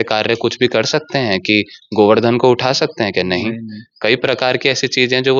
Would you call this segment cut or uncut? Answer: uncut